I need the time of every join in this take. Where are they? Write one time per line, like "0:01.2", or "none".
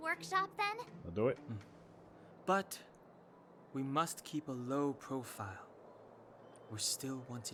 none